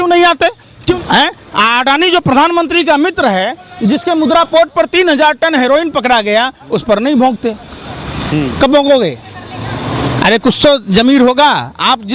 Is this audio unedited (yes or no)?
no